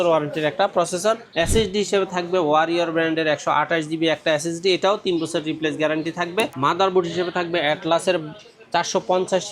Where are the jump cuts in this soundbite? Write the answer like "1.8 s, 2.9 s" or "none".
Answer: 1.3 s, 6.5 s